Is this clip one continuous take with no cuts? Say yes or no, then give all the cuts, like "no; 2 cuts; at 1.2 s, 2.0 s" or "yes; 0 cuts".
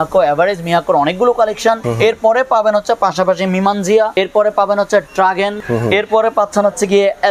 no; 3 cuts; at 1.9 s, 4.1 s, 5.6 s